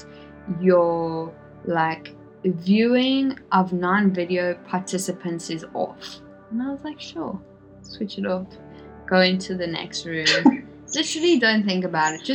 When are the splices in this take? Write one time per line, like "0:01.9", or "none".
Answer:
none